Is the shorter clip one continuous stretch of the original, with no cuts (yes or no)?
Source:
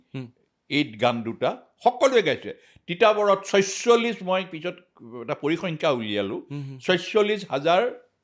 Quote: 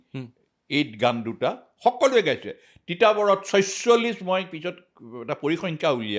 yes